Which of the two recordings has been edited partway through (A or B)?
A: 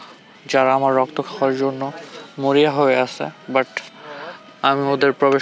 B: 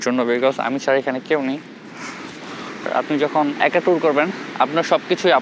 B